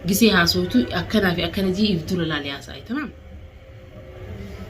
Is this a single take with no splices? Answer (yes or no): no